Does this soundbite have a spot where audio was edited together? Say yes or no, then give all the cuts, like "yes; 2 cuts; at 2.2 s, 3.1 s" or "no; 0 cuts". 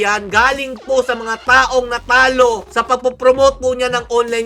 no; 0 cuts